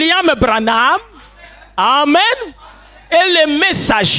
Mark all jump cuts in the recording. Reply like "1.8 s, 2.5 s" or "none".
none